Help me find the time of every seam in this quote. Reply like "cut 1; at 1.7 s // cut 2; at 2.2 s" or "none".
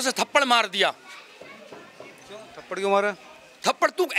none